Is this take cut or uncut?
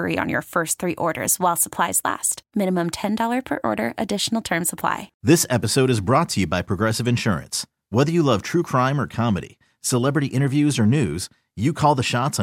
cut